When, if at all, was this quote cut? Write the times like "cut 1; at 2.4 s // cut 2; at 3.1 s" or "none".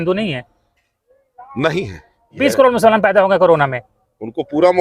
cut 1; at 2.3 s